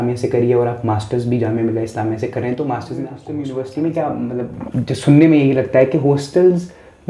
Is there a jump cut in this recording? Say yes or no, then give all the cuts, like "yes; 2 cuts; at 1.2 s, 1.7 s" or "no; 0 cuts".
yes; 1 cut; at 3.2 s